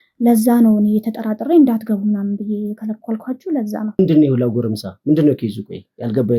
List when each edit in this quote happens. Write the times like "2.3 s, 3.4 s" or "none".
4.0 s